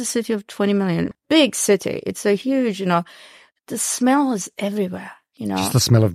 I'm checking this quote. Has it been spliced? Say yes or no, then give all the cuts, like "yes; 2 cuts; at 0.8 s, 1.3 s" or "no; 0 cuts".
yes; 1 cut; at 1.1 s